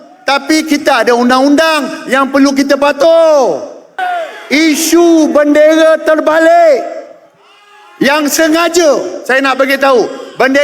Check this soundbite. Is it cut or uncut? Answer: cut